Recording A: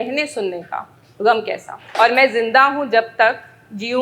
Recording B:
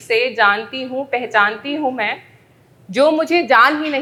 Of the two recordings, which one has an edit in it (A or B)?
A